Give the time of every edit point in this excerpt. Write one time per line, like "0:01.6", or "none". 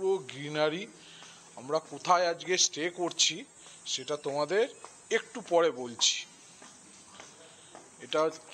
none